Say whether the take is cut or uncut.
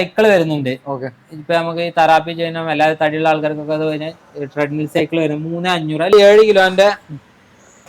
cut